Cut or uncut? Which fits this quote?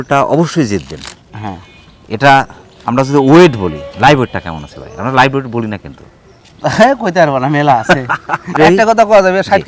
uncut